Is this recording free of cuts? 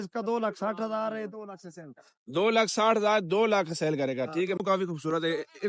no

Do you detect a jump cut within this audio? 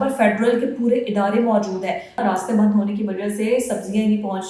yes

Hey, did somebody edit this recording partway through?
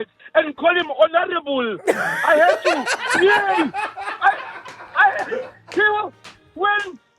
no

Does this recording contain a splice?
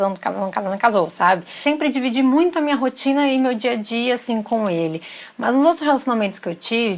yes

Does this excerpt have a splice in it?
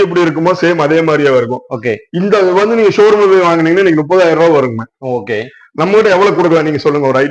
no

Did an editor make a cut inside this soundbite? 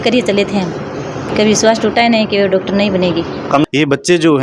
yes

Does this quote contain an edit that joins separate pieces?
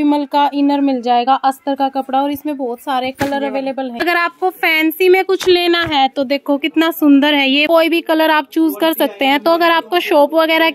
yes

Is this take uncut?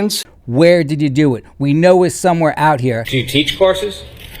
no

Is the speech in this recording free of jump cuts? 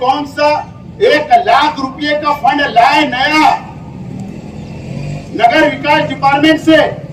yes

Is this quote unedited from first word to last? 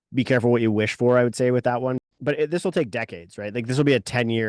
no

